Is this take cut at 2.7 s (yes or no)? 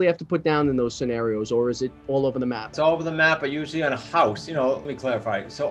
yes